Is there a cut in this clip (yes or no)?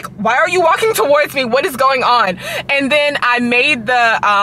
no